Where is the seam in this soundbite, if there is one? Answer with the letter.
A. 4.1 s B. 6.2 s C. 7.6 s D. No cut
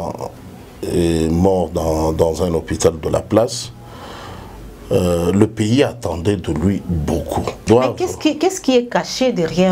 C